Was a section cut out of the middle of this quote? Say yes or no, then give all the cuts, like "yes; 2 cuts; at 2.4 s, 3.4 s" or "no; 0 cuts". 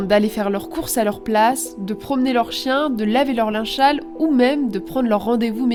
no; 0 cuts